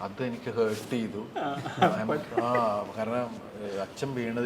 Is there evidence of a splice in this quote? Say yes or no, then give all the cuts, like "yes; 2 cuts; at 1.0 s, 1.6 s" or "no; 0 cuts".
no; 0 cuts